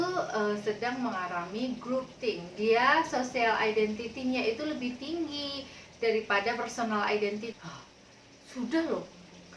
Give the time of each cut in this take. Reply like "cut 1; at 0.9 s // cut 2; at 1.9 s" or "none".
cut 1; at 7.5 s

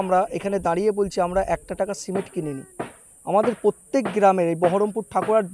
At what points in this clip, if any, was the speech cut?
none

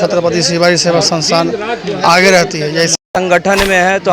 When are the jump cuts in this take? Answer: cut 1; at 3.0 s

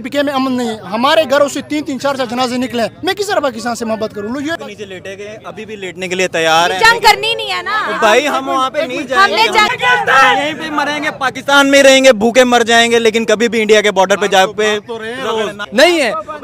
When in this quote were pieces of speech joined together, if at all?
cut 1; at 4.6 s // cut 2; at 9.7 s // cut 3; at 15.6 s

